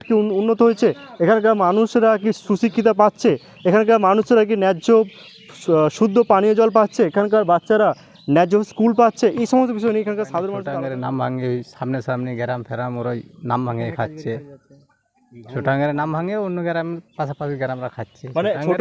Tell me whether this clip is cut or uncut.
cut